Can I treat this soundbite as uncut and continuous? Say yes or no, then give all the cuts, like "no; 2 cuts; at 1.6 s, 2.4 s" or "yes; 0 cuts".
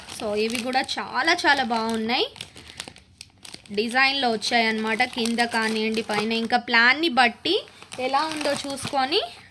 yes; 0 cuts